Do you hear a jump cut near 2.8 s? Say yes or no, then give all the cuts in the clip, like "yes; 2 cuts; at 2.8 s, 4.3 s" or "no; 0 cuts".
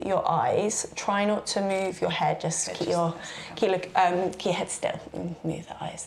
no; 0 cuts